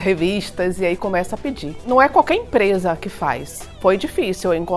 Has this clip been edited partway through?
yes; 1 cut; at 1.9 s

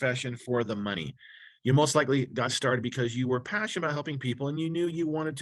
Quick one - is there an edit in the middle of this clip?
no; 0 cuts

